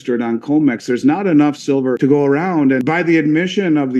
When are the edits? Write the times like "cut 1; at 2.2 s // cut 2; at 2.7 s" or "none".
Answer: cut 1; at 2.0 s // cut 2; at 2.8 s